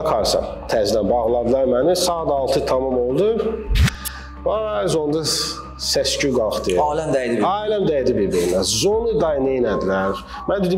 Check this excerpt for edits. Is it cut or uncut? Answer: uncut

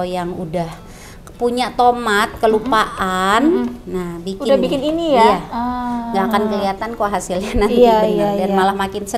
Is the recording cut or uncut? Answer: uncut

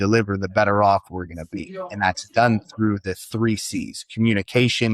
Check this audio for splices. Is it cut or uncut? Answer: uncut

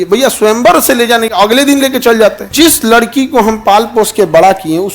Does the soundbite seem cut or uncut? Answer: cut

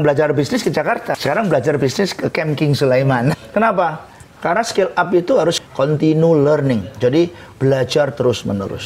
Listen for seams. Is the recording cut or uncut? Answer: cut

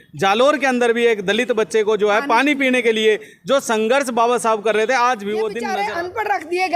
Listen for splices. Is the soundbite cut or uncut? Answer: cut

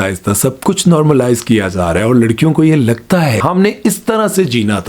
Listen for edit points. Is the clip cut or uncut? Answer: cut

